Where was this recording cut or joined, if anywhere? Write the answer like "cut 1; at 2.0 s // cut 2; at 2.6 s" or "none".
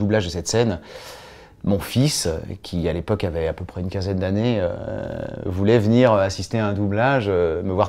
none